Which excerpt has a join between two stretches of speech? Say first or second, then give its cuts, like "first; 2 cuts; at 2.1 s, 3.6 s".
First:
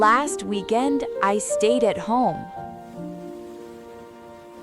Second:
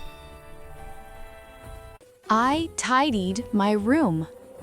second; 1 cut; at 2.1 s